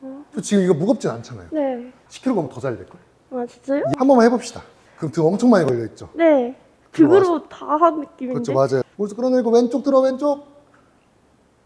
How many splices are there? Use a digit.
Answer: 2